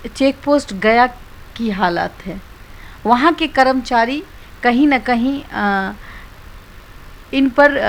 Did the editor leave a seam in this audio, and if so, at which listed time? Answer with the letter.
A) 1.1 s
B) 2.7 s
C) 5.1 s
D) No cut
D